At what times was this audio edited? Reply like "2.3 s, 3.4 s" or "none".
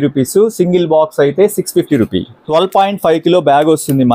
2.4 s